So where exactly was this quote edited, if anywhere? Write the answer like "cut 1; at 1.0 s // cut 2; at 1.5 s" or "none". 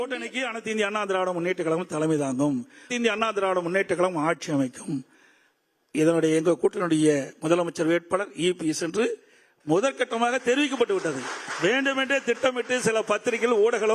cut 1; at 2.9 s